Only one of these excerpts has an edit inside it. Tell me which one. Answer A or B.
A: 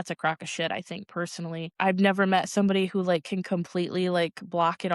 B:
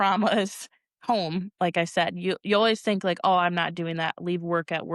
A